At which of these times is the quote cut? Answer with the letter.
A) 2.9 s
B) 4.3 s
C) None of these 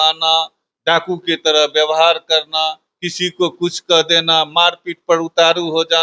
C